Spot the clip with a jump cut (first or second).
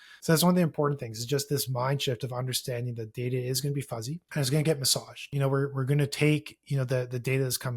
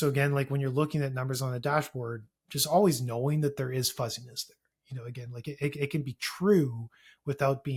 first